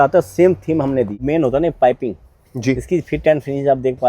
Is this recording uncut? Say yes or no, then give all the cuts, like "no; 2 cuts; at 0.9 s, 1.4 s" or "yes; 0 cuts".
no; 1 cut; at 1.2 s